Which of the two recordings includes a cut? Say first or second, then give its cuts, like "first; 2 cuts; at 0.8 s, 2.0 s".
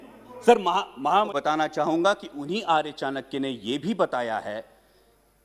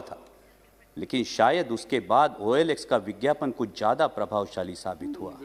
first; 1 cut; at 1.3 s